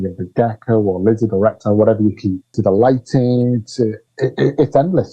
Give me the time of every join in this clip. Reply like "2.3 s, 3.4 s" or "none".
2.5 s, 4.0 s